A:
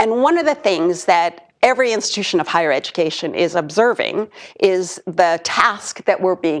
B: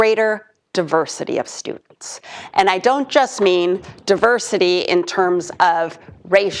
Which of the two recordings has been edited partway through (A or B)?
B